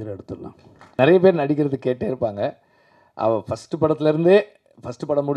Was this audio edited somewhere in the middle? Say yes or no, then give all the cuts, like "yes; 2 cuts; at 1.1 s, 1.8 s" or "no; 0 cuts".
yes; 1 cut; at 0.9 s